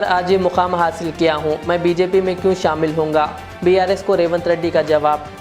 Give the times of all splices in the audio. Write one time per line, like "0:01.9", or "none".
none